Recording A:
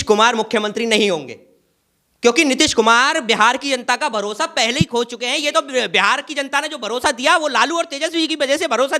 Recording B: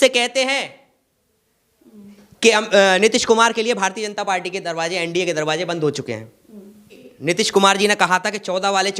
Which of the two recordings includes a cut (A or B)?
B